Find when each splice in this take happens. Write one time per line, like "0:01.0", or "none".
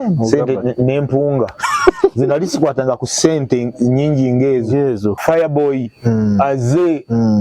0:05.2